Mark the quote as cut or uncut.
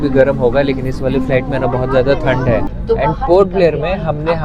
cut